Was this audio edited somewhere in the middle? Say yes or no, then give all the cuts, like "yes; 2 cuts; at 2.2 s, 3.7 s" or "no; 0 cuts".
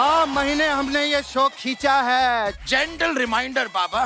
yes; 1 cut; at 2.6 s